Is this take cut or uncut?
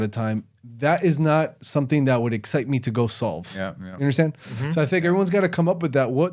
uncut